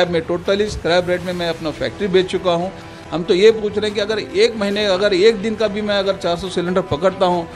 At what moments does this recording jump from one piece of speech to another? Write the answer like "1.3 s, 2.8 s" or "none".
2.8 s

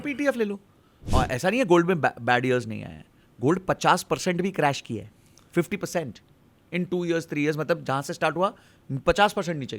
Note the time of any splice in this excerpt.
1.0 s

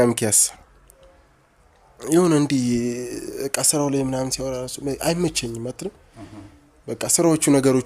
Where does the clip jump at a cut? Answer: none

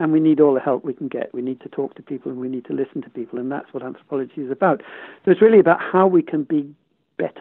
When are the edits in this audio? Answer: none

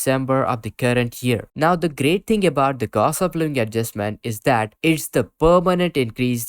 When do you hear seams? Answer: 1.5 s

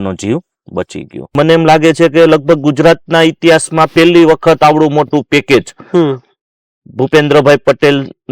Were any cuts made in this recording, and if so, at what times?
1.3 s

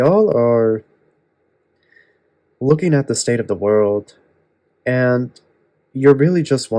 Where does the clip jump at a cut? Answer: none

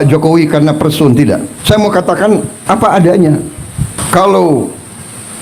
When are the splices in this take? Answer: 1.5 s, 2.6 s, 4.0 s

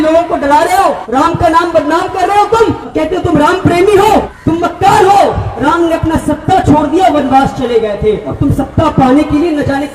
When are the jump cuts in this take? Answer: 1.0 s, 2.8 s, 4.3 s, 5.5 s, 8.3 s

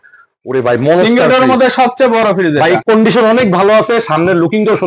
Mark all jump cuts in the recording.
2.8 s

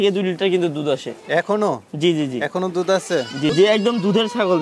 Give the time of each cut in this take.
3.5 s

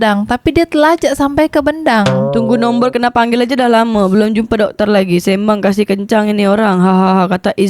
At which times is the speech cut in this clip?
2.3 s

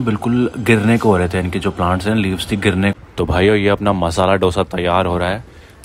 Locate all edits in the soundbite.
3.0 s

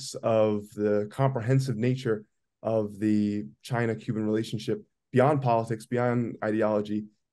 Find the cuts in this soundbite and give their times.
none

